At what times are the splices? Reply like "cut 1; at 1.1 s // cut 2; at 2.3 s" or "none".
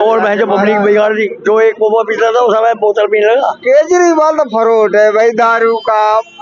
cut 1; at 1.4 s // cut 2; at 3.6 s